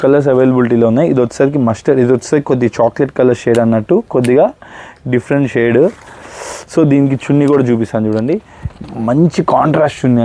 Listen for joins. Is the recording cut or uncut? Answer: uncut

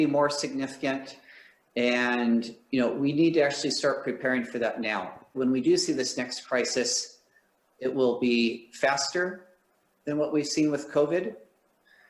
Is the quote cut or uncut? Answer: cut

